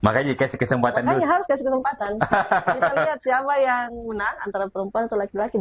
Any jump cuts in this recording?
no; 0 cuts

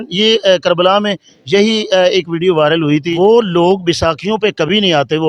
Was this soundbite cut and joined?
yes; 1 cut; at 3.1 s

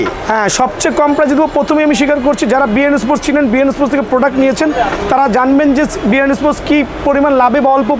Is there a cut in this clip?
no; 0 cuts

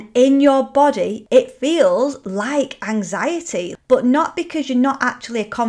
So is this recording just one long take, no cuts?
no; 2 cuts; at 1.2 s, 3.7 s

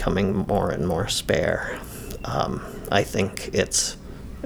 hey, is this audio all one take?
yes; 0 cuts

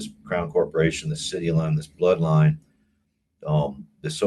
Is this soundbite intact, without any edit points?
yes; 0 cuts

